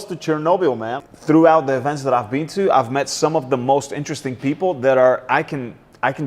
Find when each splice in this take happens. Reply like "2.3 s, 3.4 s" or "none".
0.9 s